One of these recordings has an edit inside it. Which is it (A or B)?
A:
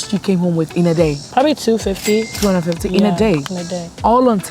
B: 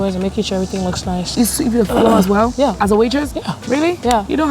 B